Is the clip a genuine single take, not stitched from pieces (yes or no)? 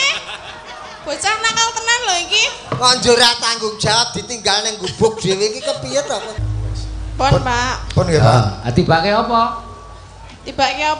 no